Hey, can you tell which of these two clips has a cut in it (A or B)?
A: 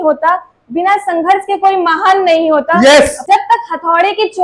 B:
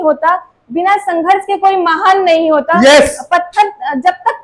A